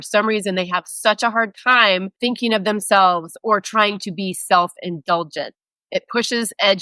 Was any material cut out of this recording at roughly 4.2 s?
no; 1 cut; at 2.1 s

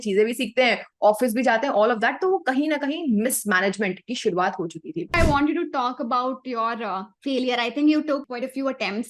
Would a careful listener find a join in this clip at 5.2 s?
yes; 3 cuts; at 5.2 s, 7.1 s, 8.3 s

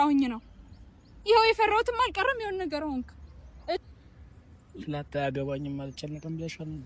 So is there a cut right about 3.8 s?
yes; 1 cut; at 3.8 s

